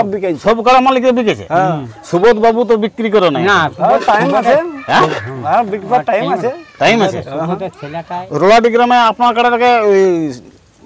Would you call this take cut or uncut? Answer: cut